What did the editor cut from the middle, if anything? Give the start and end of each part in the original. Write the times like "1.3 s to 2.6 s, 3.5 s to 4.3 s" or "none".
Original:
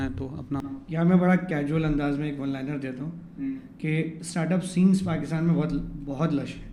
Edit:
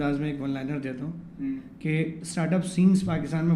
none